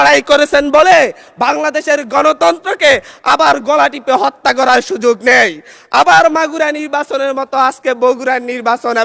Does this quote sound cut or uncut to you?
uncut